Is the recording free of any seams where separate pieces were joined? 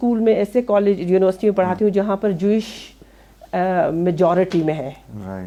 yes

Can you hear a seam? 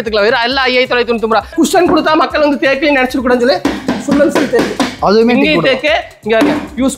yes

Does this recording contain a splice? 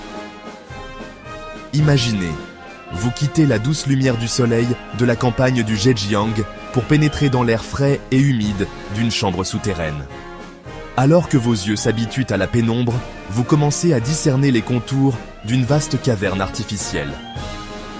yes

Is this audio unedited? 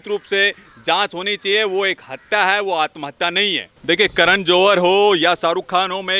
no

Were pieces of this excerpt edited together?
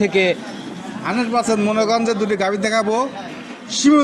no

